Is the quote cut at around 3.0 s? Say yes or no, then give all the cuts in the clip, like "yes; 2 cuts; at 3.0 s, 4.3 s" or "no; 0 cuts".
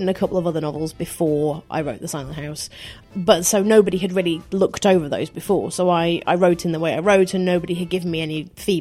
yes; 1 cut; at 3.0 s